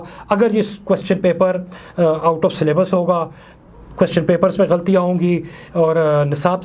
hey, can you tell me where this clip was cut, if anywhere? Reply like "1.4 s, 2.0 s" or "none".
none